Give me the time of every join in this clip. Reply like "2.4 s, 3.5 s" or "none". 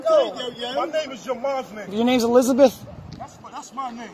1.9 s